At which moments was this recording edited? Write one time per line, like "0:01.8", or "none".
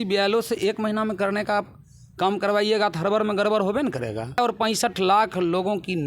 0:04.5